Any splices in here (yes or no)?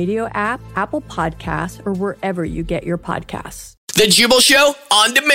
yes